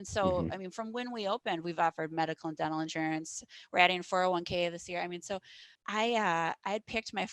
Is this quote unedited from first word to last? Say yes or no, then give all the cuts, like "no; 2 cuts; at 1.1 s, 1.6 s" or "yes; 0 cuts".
no; 1 cut; at 5.8 s